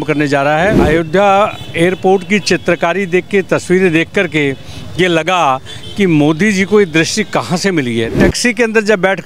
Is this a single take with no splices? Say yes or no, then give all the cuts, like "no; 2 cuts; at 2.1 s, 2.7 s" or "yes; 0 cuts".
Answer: no; 2 cuts; at 0.8 s, 8.1 s